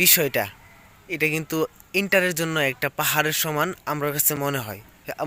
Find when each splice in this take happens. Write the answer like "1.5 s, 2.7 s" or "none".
none